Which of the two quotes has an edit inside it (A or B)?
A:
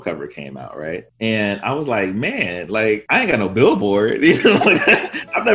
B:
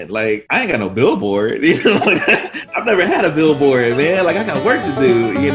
A